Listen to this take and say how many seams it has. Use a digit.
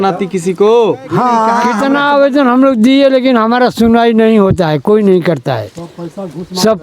1